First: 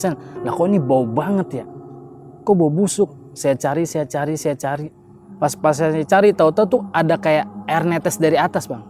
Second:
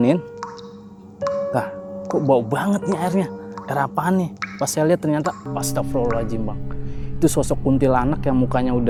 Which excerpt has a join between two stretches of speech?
first; 1 cut; at 5.2 s

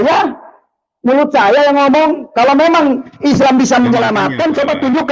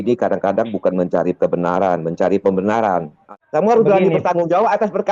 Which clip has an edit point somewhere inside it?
second; 1 cut; at 3.2 s

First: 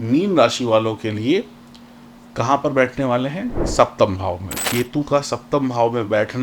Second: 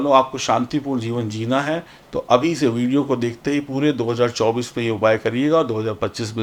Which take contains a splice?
first; 1 cut; at 4.6 s

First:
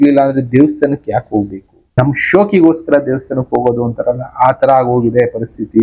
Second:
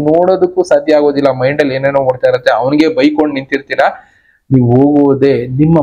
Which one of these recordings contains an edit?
first; 1 cut; at 2.0 s

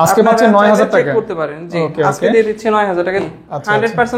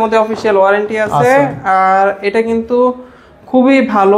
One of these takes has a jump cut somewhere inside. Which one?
first; 1 cut; at 3.2 s

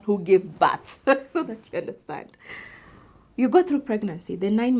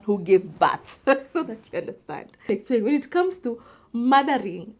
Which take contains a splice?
second; 1 cut; at 2.5 s

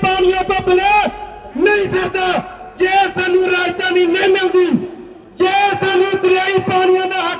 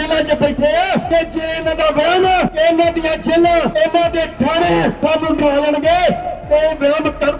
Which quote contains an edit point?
second; 4 cuts; at 1.1 s, 2.5 s, 3.7 s, 5.0 s

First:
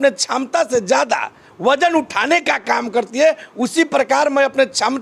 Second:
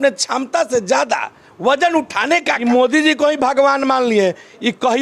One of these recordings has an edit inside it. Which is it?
second; 1 cut; at 2.6 s

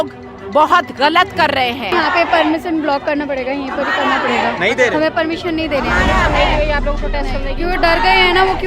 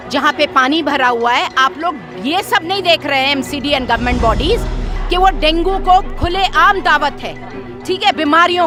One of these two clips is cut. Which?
first; 1 cut; at 1.9 s

